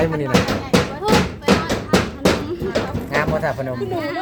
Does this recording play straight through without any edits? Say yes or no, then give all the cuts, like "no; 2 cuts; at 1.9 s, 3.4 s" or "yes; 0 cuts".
yes; 0 cuts